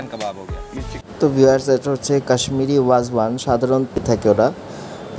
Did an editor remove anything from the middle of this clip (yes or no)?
yes